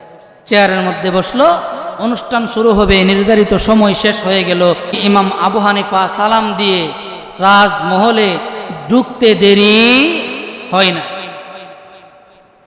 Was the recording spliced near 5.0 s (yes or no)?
yes